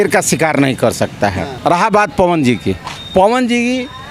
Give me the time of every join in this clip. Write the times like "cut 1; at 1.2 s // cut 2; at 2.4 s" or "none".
cut 1; at 1.5 s